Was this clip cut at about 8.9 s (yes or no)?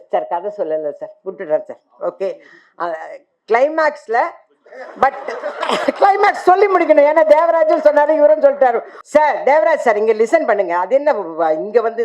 yes